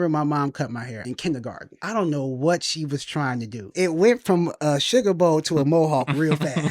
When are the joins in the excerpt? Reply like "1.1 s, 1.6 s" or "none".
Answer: 1.0 s, 1.7 s, 3.7 s, 4.5 s